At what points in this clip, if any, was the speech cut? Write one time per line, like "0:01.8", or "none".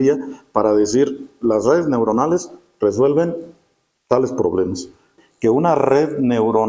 0:05.1